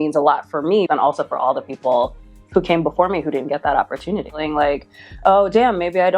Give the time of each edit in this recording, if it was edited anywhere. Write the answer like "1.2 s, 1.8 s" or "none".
0.9 s, 4.4 s